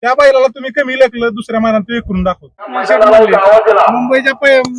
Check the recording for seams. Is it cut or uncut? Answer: cut